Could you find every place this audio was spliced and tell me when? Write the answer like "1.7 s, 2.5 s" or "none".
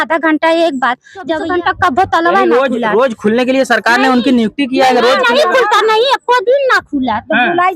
1.4 s